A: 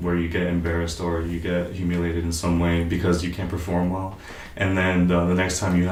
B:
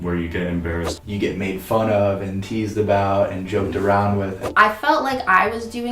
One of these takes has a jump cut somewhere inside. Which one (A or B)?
B